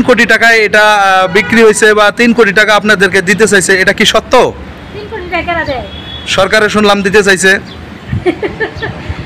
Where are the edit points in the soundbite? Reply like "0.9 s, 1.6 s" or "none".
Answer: none